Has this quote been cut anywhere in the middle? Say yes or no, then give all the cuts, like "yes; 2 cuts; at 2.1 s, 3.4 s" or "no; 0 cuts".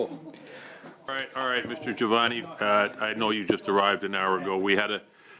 yes; 1 cut; at 1.1 s